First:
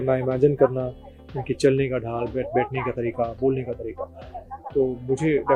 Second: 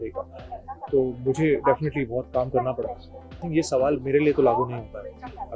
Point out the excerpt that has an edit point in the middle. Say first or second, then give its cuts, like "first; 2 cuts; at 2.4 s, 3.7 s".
second; 1 cut; at 3.4 s